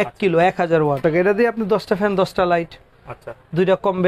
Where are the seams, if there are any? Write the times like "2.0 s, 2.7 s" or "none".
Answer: 1.0 s